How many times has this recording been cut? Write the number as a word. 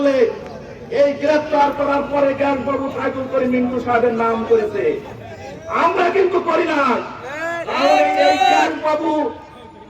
zero